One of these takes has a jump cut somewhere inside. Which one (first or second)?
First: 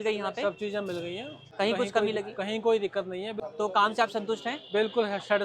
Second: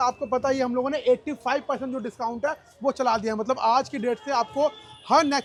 first